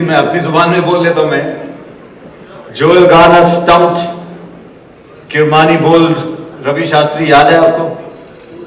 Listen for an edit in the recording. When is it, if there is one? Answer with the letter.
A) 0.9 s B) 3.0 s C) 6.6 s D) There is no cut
D